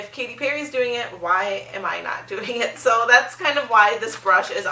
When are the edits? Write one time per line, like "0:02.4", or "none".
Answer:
none